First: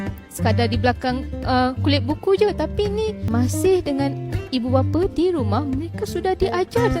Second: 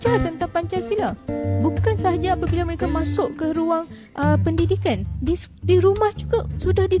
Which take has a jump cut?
first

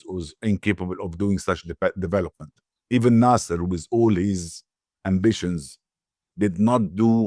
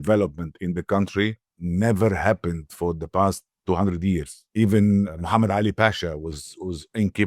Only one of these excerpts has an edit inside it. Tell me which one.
second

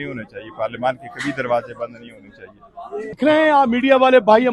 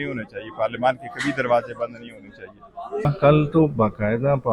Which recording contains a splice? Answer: second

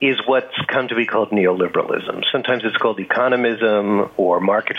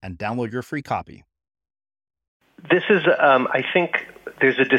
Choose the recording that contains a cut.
second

